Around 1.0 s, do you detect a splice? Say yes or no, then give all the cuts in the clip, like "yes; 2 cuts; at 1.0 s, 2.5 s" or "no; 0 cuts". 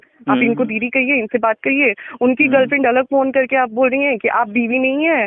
no; 0 cuts